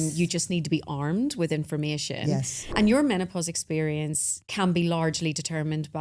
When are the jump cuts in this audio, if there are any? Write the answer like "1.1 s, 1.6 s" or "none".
2.6 s, 4.4 s